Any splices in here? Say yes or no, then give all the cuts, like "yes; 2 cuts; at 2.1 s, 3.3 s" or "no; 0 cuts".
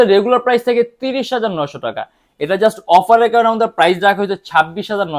no; 0 cuts